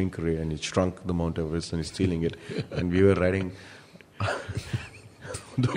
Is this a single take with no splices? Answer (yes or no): yes